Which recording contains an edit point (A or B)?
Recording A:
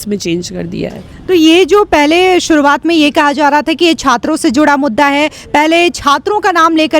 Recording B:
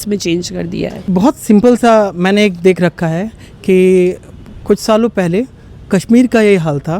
B